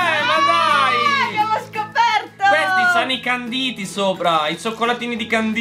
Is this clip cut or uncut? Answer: uncut